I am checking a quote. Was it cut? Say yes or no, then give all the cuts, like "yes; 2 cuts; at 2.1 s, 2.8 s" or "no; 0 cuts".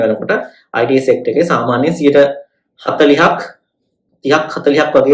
no; 0 cuts